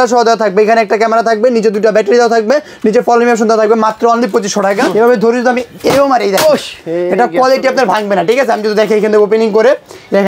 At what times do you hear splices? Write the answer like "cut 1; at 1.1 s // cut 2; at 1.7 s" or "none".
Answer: cut 1; at 4.8 s